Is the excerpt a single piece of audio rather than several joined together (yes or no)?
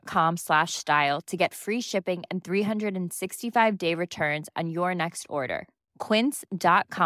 yes